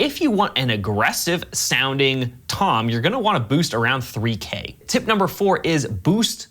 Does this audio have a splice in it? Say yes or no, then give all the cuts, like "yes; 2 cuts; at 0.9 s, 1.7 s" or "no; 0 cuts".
yes; 1 cut; at 4.8 s